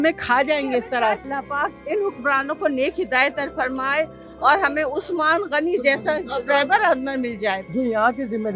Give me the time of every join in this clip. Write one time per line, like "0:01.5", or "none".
0:01.3
0:07.6